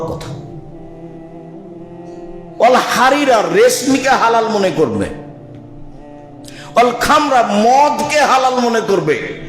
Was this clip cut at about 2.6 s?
yes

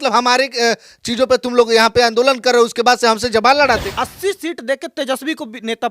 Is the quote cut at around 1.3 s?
no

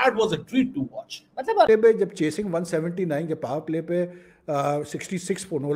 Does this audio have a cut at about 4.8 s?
no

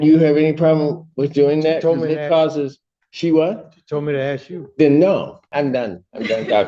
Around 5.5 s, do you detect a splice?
yes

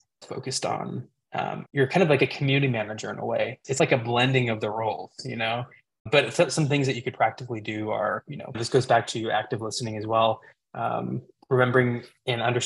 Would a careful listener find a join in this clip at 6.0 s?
yes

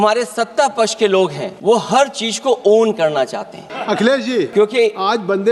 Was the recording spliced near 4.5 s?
yes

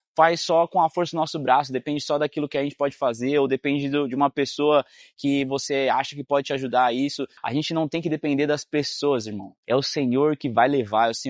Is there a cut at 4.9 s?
no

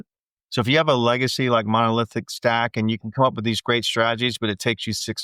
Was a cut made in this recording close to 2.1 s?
no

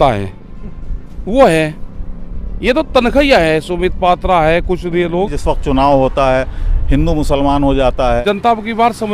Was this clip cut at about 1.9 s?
no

